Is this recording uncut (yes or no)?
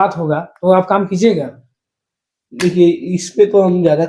yes